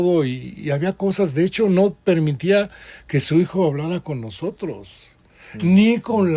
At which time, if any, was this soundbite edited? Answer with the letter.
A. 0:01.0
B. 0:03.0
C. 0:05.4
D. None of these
D